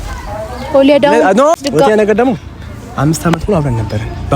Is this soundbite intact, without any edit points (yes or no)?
no